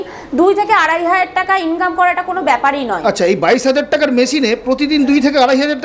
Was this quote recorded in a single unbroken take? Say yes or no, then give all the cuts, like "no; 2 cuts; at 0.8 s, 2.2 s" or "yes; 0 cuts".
yes; 0 cuts